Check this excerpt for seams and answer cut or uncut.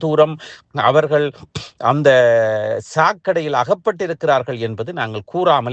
uncut